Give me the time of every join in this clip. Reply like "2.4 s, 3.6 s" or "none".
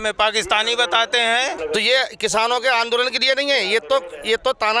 1.6 s

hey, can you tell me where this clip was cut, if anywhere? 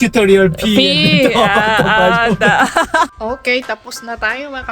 3.1 s

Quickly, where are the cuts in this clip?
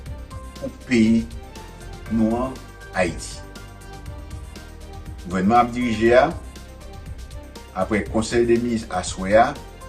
3.5 s, 5.2 s

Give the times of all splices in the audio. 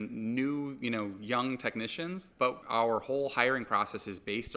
2.3 s

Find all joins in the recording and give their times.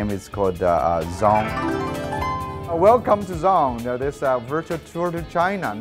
none

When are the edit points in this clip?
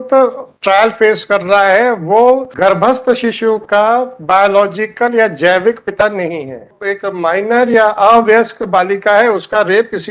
2.5 s, 6.8 s

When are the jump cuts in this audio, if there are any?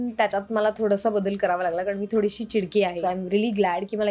3.0 s

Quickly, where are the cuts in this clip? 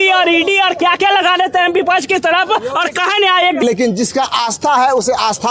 3.6 s

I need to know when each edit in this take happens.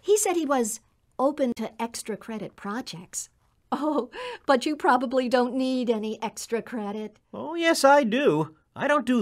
1.6 s

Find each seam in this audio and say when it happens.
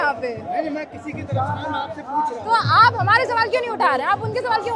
none

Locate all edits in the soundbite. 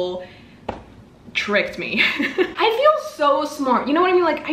2.5 s

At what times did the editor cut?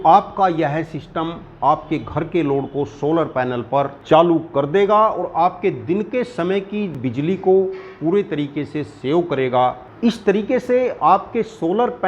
4.0 s

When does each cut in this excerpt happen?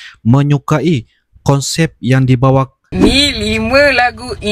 2.8 s

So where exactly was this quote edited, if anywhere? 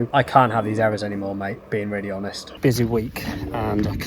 2.5 s

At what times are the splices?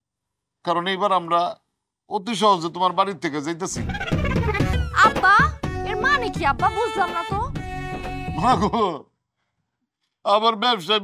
4.8 s

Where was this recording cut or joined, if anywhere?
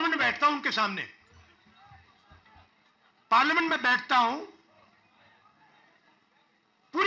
none

